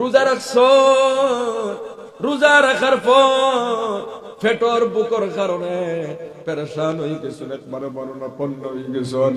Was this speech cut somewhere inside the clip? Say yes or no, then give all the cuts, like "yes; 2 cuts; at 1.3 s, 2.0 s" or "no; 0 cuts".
no; 0 cuts